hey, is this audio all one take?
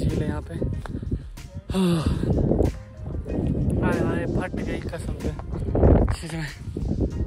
yes; 0 cuts

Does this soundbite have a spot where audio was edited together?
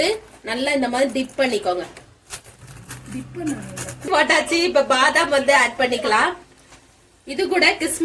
yes; 1 cut; at 4.1 s

